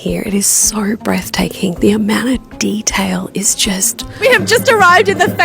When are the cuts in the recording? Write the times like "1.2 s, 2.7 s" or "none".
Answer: 4.0 s